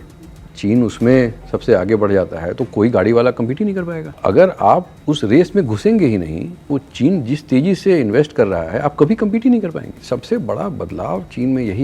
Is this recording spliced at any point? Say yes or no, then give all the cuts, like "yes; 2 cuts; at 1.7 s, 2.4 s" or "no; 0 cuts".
yes; 3 cuts; at 4.0 s, 4.9 s, 10.0 s